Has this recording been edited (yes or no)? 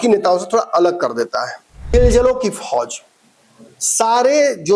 yes